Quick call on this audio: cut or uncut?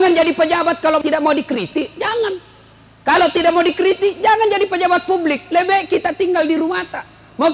cut